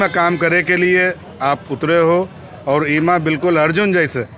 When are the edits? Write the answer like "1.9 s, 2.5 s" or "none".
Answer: none